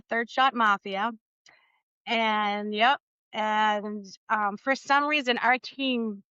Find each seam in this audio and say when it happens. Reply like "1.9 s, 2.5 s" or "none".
none